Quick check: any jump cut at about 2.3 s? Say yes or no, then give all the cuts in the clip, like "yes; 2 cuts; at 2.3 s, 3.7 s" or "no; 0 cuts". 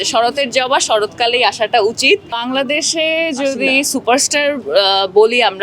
yes; 1 cut; at 2.3 s